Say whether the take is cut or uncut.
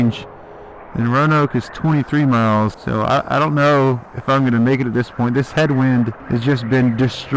cut